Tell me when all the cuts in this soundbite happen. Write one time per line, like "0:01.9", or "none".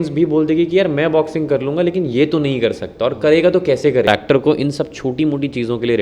0:04.1